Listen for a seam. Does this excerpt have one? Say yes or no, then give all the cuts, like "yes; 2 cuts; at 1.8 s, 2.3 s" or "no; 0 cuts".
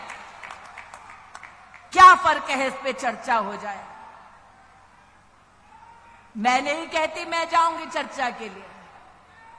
no; 0 cuts